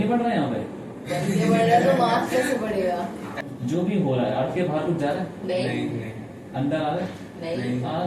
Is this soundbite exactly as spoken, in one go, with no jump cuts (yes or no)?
no